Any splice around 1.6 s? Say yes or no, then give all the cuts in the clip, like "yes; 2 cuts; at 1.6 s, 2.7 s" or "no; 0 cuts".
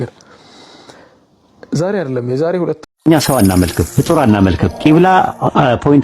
no; 1 cut; at 2.8 s